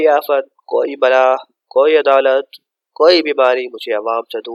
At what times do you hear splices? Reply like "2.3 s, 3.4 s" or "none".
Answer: none